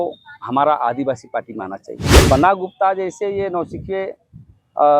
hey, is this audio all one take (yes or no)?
no